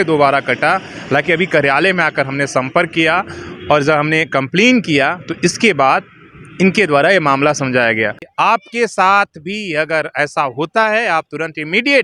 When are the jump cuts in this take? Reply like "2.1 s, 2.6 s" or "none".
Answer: 8.2 s